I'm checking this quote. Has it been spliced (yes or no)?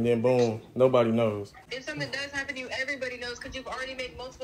yes